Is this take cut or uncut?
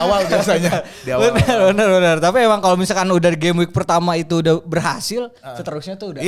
uncut